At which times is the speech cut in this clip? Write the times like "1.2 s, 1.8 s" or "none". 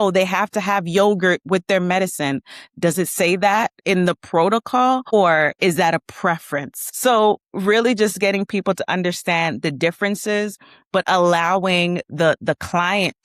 none